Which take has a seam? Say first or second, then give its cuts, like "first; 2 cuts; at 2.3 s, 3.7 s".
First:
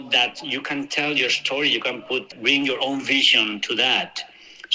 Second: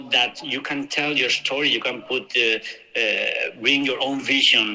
first; 1 cut; at 2.3 s